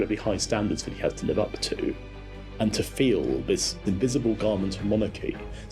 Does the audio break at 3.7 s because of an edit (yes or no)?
yes